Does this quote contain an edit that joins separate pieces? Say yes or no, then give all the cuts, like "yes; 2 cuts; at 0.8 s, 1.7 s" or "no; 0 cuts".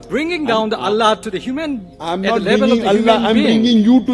no; 0 cuts